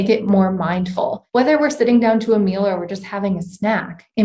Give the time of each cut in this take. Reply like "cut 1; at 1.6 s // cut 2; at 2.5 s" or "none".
cut 1; at 1.2 s